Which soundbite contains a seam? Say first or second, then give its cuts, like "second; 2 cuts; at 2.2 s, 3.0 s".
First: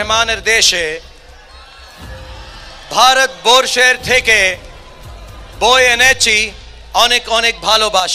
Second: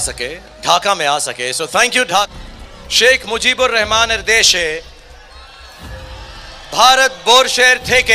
second; 1 cut; at 2.3 s